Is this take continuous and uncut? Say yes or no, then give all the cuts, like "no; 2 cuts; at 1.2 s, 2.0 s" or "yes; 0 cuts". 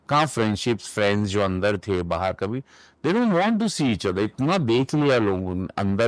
yes; 0 cuts